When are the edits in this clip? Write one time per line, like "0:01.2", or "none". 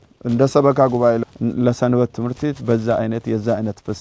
0:01.2

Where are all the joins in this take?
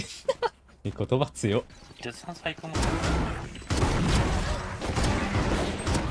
0:01.8
0:03.5
0:04.8

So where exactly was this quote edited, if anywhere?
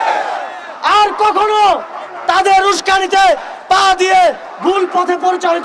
none

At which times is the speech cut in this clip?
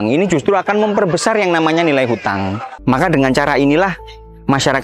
0:02.7

